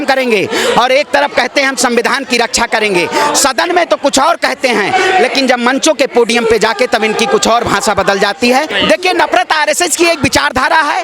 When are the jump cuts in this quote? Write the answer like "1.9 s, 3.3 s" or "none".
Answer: 8.7 s